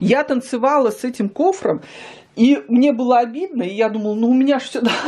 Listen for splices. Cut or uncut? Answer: uncut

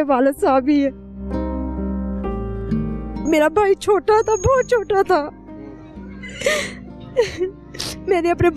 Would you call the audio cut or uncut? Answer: uncut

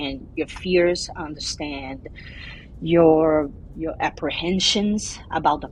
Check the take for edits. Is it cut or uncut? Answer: uncut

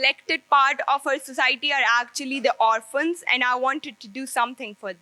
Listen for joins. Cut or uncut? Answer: uncut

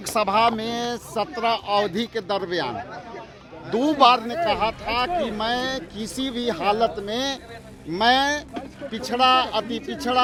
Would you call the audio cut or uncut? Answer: uncut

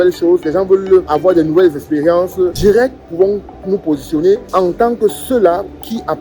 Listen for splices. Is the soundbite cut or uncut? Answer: cut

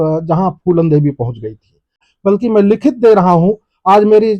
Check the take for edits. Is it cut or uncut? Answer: cut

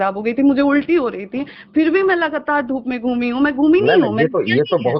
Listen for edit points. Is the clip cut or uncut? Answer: uncut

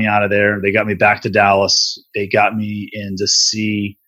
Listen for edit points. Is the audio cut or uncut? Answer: cut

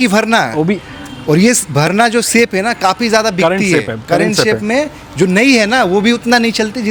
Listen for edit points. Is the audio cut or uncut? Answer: uncut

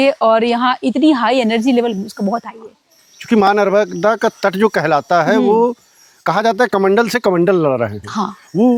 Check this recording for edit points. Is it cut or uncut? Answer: uncut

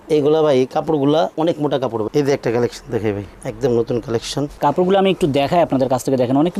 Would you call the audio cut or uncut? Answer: cut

